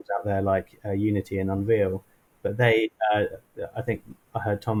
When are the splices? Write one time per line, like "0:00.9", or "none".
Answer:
none

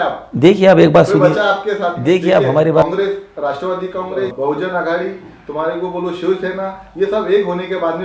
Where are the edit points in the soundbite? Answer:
0:02.8
0:04.3

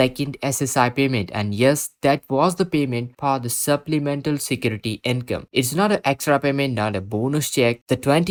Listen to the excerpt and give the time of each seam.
none

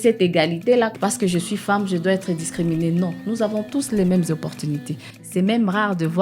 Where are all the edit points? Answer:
0:00.9
0:05.1

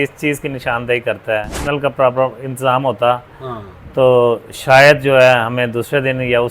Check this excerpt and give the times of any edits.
0:01.6

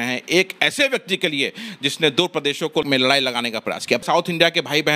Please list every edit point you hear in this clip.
0:02.8
0:04.0

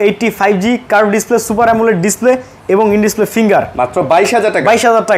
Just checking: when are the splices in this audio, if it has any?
none

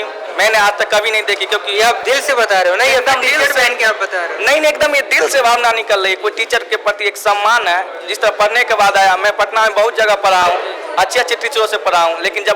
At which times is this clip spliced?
none

